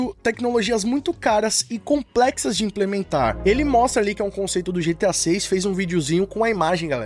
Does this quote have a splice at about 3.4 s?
yes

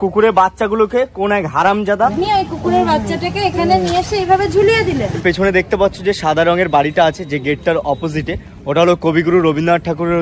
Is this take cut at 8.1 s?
no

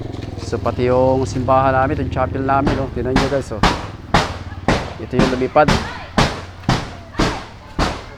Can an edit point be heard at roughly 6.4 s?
no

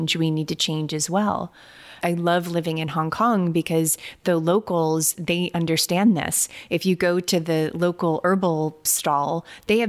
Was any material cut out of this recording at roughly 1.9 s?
yes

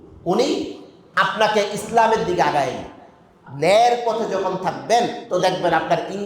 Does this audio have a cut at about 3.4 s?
yes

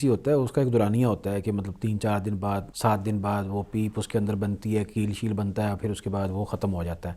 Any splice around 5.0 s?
no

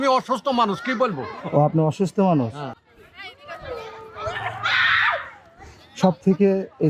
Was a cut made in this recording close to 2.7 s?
yes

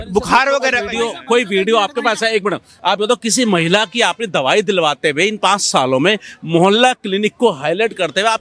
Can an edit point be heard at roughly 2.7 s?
yes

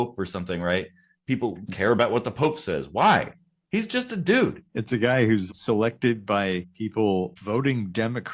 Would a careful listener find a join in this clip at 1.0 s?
no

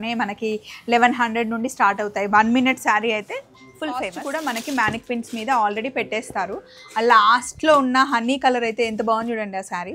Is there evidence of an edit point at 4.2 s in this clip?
yes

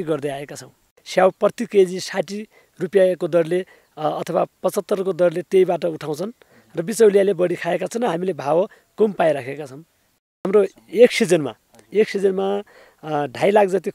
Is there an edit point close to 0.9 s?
yes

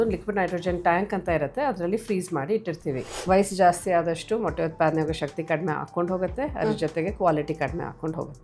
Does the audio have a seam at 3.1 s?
yes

